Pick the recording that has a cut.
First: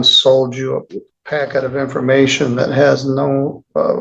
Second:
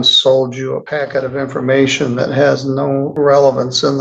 second; 2 cuts; at 0.8 s, 3.1 s

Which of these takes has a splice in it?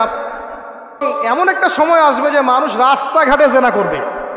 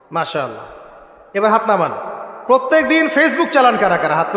first; 1 cut; at 1.0 s

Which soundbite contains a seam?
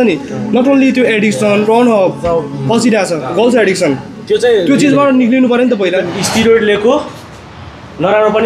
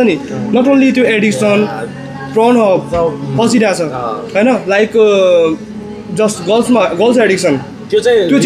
first; 3 cuts; at 1.6 s, 3.3 s, 6.1 s

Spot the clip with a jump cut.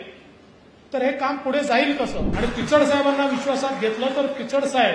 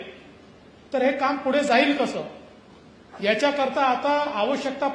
first; 1 cut; at 2.2 s

